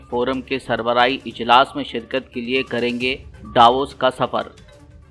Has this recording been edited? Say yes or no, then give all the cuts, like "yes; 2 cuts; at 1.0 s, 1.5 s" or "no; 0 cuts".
no; 0 cuts